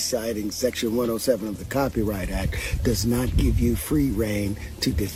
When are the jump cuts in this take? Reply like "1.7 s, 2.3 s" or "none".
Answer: none